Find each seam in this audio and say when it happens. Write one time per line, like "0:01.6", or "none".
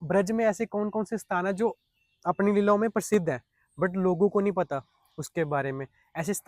none